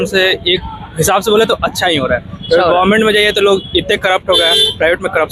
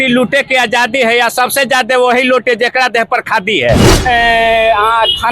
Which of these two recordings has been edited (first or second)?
second